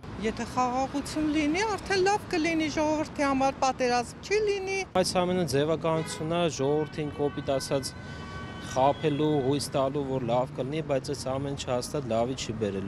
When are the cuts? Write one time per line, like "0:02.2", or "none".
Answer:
0:05.0